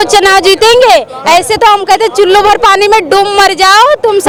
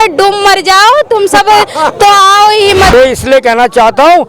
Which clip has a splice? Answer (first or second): second